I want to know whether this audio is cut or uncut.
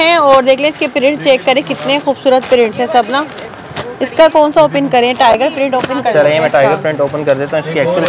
uncut